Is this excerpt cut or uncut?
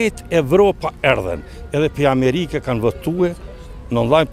uncut